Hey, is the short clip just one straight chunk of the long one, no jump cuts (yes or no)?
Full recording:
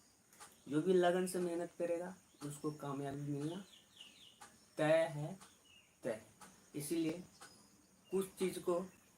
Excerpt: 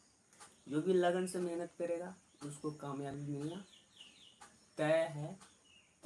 yes